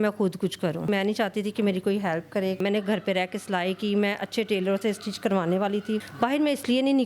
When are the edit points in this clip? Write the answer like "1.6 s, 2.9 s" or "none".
0.9 s, 2.6 s, 6.1 s